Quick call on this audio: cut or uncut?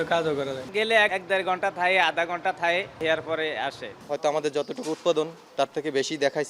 cut